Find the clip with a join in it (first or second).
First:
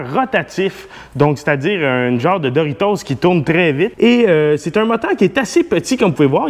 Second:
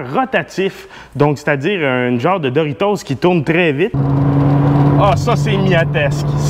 second